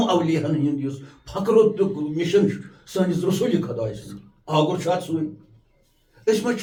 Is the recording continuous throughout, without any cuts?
yes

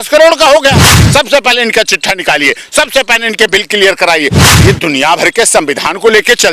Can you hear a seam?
yes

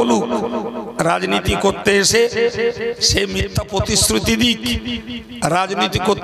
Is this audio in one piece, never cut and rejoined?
yes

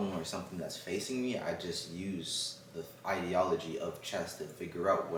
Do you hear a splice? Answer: no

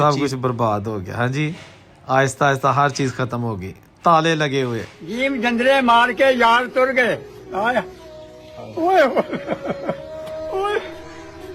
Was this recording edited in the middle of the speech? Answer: no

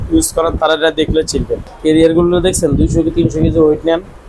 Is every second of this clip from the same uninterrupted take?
no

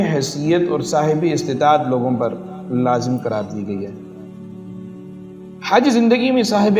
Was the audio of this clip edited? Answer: yes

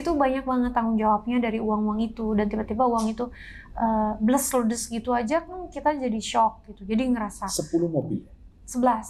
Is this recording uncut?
yes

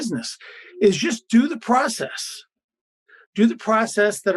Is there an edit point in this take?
no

